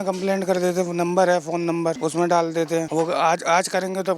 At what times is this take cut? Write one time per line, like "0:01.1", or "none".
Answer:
0:02.0
0:02.9